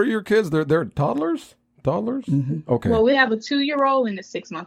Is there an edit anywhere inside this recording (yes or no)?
no